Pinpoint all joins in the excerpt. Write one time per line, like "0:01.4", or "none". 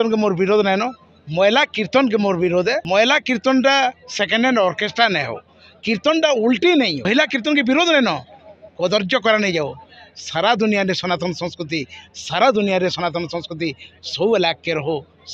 0:02.8
0:07.0